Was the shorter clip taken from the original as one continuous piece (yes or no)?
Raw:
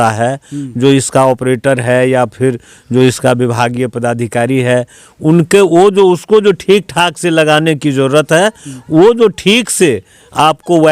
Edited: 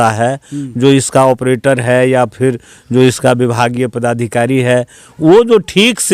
no